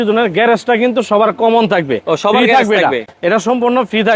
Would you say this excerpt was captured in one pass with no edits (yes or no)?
yes